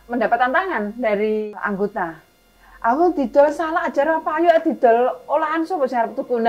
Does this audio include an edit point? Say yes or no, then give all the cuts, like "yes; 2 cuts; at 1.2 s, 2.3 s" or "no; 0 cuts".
no; 0 cuts